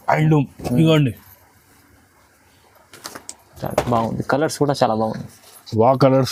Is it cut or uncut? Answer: uncut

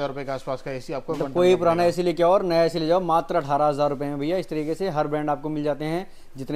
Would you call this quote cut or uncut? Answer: uncut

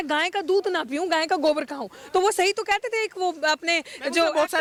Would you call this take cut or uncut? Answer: uncut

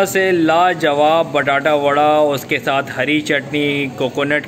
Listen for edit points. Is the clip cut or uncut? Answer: uncut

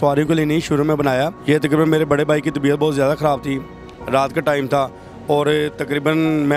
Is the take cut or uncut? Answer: uncut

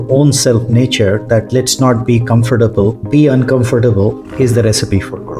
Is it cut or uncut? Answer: cut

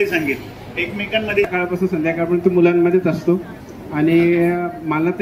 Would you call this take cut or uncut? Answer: cut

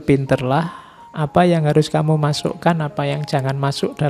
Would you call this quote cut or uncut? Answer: uncut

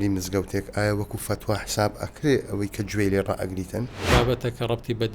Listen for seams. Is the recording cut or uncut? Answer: cut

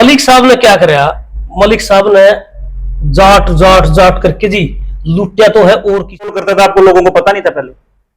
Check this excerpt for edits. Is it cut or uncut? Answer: cut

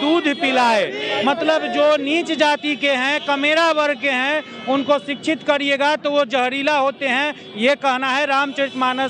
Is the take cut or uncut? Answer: uncut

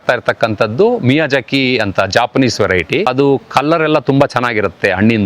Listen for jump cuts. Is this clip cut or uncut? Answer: cut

